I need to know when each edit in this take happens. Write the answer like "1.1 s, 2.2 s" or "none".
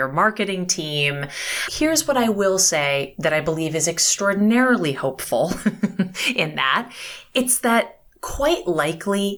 1.7 s

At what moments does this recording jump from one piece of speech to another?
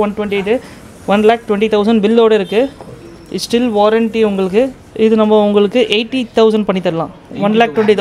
4.8 s

